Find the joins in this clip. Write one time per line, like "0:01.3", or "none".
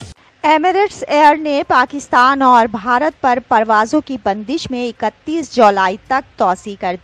none